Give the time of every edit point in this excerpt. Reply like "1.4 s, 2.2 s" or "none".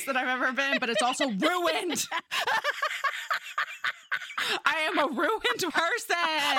none